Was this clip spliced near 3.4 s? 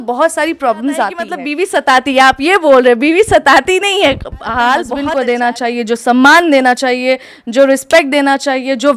no; 2 cuts; at 1.4 s, 5.0 s

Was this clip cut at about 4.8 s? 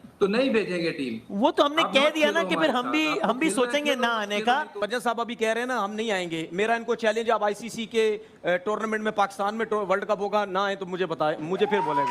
yes; 1 cut; at 4.8 s

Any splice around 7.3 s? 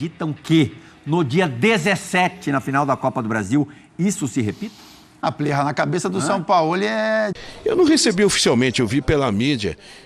yes; 1 cut; at 7.3 s

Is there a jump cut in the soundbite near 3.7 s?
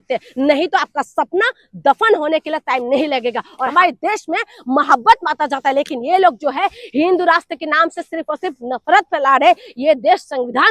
yes; 1 cut; at 3.7 s

